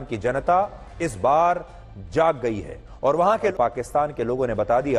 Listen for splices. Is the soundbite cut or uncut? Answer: cut